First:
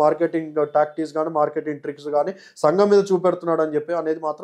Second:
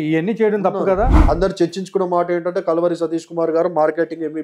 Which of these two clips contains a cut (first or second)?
second